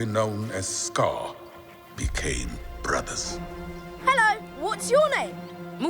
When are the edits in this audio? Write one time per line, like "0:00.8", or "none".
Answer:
0:03.8